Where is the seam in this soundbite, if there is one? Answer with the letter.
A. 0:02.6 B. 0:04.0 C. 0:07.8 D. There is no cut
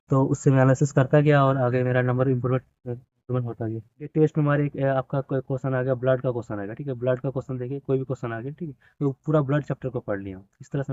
B